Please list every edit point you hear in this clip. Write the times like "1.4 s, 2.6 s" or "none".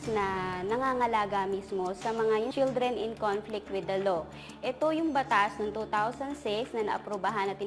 none